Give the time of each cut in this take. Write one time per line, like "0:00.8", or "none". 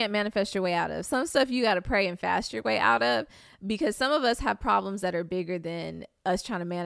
none